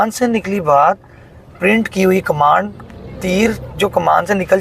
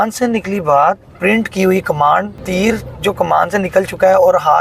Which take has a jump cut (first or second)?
second